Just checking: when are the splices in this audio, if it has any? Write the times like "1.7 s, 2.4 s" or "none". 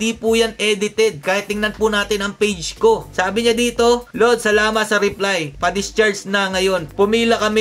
none

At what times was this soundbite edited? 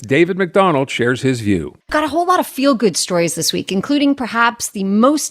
1.8 s

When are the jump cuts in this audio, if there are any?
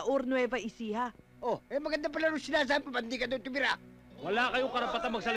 none

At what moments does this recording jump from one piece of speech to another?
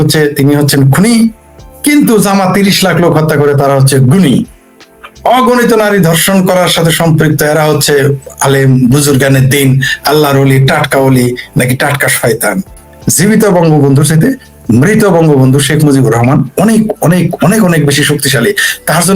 12.8 s

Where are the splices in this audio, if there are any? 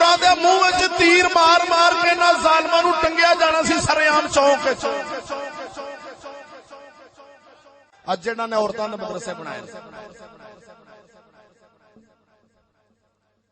7.9 s

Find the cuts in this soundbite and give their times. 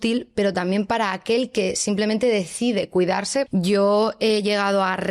3.5 s

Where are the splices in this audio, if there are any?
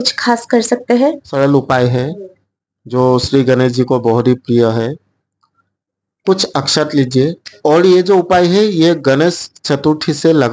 1.2 s, 7.5 s

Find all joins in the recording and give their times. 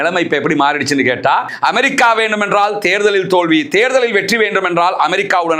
1.5 s

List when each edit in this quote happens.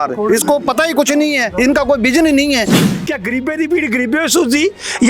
2.8 s

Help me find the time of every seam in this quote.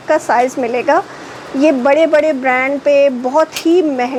none

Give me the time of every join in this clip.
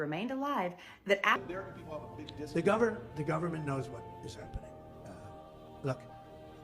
1.4 s

